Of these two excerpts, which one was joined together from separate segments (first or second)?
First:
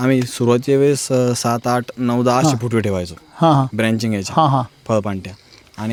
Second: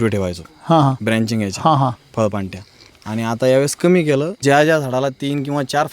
second